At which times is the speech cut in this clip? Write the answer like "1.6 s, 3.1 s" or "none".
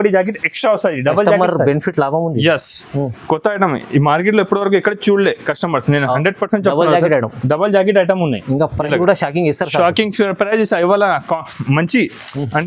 none